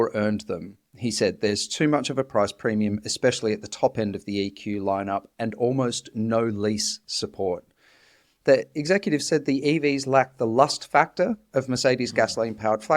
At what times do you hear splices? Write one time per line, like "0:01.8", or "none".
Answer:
0:08.2